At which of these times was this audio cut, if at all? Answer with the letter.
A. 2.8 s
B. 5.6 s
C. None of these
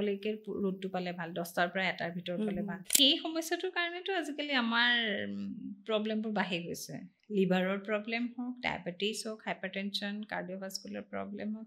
A